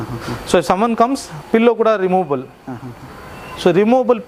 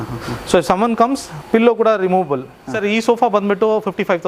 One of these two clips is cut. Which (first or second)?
second